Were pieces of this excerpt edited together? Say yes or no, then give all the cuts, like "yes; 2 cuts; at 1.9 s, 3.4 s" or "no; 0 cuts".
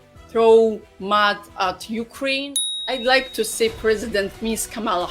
yes; 1 cut; at 2.5 s